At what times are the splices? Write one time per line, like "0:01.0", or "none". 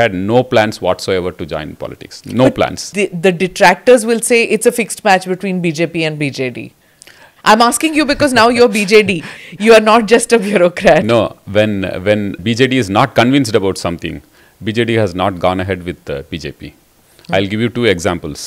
0:02.8